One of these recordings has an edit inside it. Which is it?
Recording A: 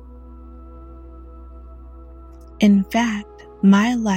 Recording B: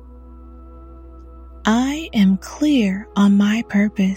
B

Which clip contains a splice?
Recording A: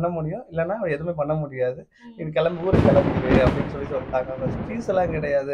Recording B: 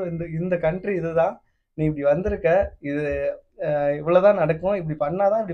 A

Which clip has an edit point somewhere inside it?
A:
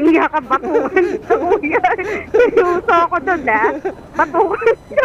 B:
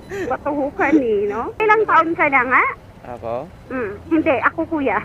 B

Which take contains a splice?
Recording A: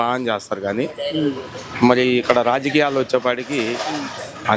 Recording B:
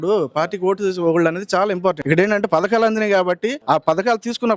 B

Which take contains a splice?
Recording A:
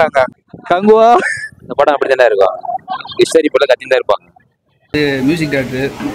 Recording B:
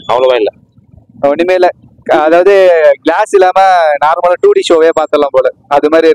A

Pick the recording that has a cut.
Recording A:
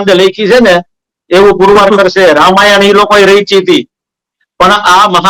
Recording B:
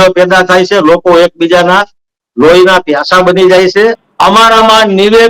B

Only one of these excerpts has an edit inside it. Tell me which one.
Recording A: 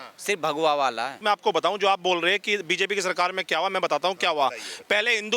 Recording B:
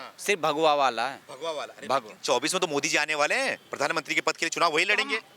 A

